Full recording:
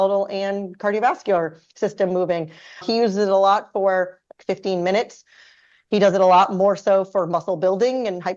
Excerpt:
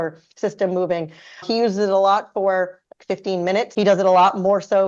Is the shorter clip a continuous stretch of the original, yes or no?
no